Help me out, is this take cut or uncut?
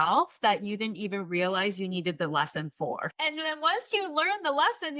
cut